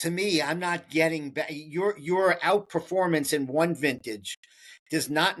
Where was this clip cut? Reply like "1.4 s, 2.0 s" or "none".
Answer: none